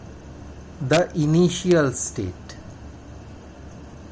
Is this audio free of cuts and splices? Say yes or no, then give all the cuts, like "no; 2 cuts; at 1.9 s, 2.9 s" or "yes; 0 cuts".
yes; 0 cuts